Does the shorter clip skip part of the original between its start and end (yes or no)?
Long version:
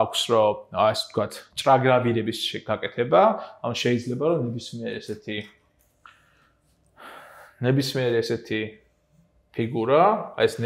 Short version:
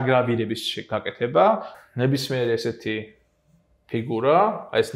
yes